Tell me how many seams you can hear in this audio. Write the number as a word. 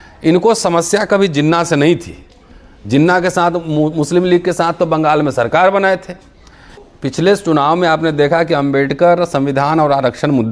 one